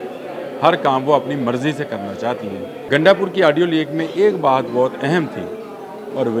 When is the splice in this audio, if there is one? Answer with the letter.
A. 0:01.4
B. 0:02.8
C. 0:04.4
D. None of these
B